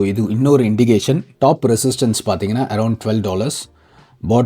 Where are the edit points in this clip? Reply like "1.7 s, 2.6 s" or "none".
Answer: 1.3 s